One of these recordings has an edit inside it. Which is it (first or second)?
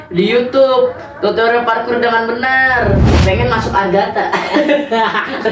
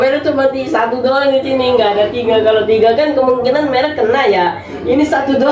first